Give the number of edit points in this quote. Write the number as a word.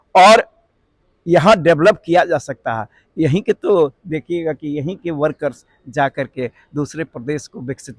zero